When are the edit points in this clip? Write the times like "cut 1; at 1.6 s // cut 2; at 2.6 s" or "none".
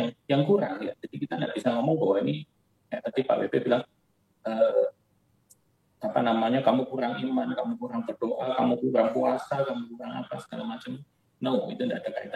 none